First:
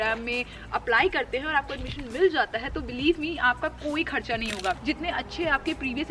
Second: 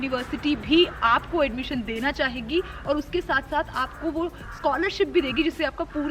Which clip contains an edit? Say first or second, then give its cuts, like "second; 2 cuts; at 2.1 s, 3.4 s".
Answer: first; 1 cut; at 4.8 s